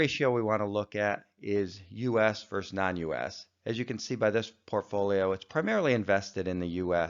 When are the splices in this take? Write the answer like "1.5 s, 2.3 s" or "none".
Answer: none